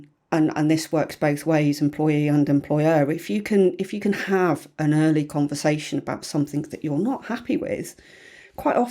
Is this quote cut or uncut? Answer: uncut